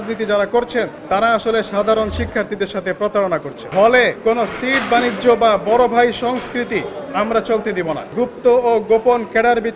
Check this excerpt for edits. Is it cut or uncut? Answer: cut